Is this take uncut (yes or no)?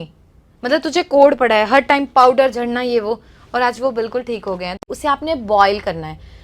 no